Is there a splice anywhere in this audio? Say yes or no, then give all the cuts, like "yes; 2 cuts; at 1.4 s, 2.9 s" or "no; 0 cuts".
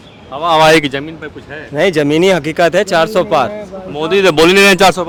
no; 0 cuts